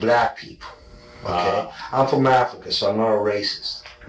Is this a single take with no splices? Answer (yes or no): yes